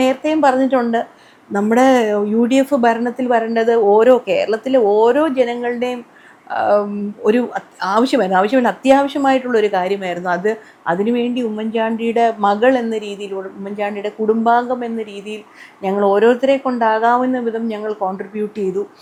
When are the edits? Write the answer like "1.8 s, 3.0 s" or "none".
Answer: none